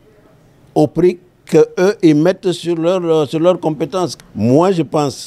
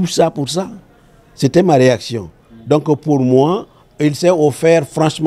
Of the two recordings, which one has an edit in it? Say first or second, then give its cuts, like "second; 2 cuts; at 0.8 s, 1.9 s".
first; 1 cut; at 4.1 s